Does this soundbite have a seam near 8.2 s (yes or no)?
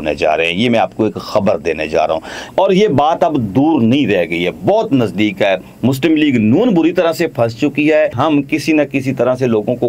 yes